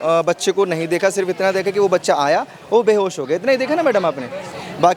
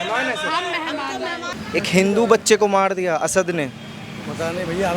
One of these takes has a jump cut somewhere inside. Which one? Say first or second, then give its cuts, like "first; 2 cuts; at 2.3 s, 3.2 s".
second; 1 cut; at 1.5 s